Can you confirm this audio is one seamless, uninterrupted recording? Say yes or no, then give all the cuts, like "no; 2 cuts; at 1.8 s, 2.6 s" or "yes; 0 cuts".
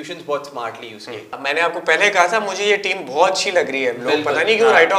no; 1 cut; at 1.3 s